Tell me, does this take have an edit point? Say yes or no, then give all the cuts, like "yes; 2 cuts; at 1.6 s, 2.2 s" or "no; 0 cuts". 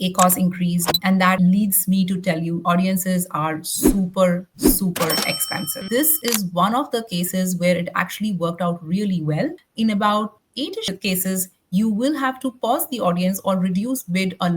yes; 2 cuts; at 1.4 s, 5.8 s